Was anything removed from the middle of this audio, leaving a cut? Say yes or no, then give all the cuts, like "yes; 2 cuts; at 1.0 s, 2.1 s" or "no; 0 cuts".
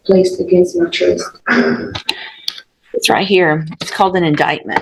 no; 0 cuts